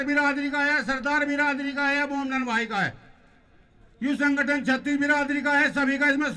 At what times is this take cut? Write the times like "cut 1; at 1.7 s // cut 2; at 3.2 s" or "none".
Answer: none